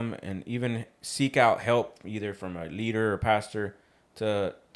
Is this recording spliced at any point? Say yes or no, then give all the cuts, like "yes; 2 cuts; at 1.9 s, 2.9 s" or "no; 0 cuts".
no; 0 cuts